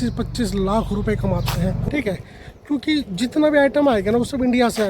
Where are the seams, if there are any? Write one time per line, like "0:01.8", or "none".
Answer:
0:01.8